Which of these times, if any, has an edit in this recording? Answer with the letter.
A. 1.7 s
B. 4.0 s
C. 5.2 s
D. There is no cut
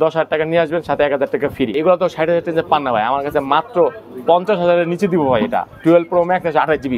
A